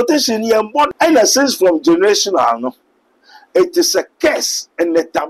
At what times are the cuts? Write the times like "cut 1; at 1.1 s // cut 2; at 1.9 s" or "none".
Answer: cut 1; at 0.9 s

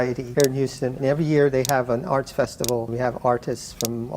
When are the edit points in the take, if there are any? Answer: cut 1; at 2.9 s

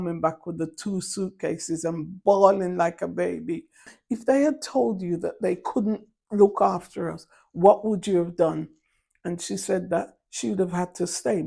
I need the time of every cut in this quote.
cut 1; at 3.9 s

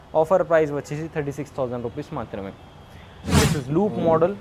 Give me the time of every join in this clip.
none

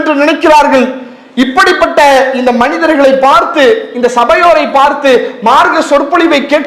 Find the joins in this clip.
none

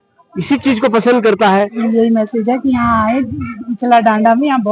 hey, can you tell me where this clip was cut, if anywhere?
cut 1; at 1.8 s

